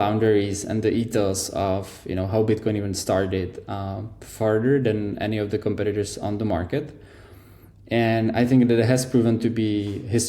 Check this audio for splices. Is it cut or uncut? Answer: uncut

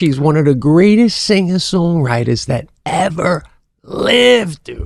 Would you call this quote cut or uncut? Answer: uncut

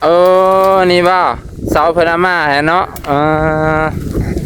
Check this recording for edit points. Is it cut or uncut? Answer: uncut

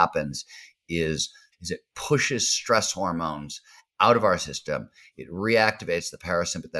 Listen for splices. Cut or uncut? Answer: cut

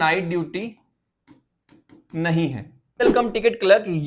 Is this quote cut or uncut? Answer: cut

